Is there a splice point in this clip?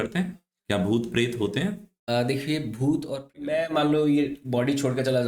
yes; 1 cut; at 3.3 s

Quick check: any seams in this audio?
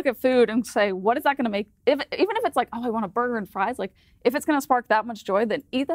no; 0 cuts

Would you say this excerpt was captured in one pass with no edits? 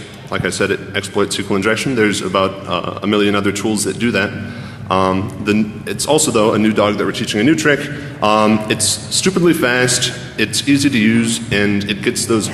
no; 1 cut; at 11.2 s

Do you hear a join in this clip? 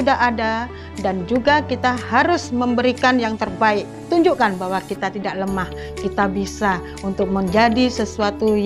no; 0 cuts

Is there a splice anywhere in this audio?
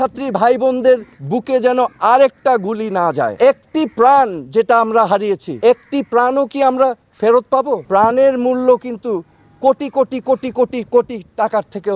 yes; 2 cuts; at 3.3 s, 7.8 s

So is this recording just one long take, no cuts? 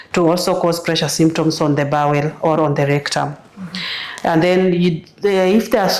yes; 0 cuts

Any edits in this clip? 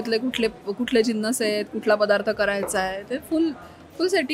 no; 0 cuts

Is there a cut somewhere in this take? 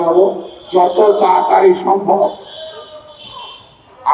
no; 0 cuts

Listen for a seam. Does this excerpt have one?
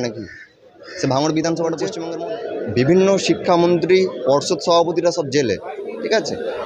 yes; 1 cut; at 1.9 s

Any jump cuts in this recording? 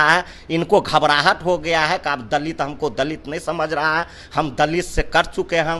no; 0 cuts

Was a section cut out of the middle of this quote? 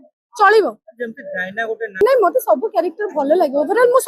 yes; 1 cut; at 2.0 s

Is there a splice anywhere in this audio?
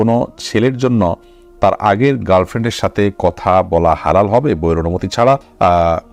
no; 0 cuts

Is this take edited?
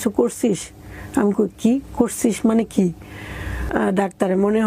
yes; 1 cut; at 3.6 s

